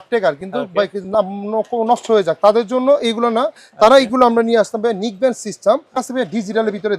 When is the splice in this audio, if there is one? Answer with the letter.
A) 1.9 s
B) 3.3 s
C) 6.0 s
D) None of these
C